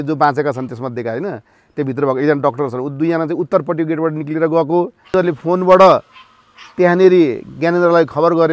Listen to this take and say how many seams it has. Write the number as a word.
one